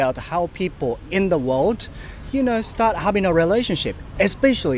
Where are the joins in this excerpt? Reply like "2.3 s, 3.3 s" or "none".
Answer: none